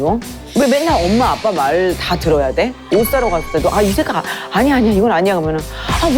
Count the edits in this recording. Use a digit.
1